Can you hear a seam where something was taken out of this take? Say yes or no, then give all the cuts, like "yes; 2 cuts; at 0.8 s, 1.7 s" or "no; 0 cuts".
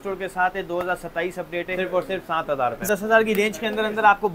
yes; 2 cuts; at 1.7 s, 2.9 s